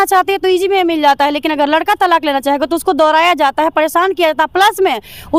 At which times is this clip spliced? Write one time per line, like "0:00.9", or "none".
none

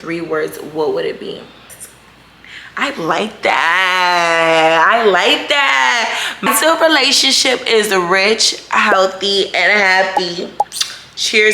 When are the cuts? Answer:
0:01.5
0:06.4

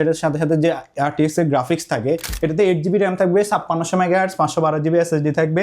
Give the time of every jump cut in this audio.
0:02.3

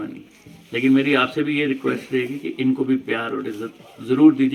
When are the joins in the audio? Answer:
none

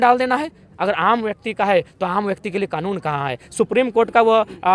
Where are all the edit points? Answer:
none

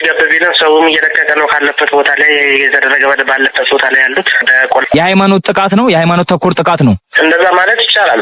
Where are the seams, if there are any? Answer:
0:04.8

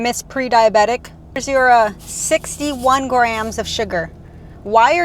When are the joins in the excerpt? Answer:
0:01.4

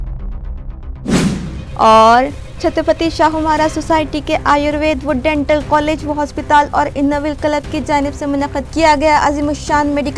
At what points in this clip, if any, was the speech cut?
none

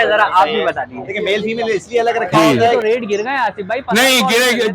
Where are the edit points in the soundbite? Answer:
0:02.6

